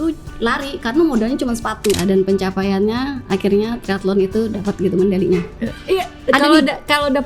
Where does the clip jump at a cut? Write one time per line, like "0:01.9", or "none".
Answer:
0:02.0